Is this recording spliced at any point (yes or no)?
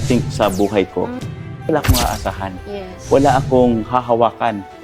yes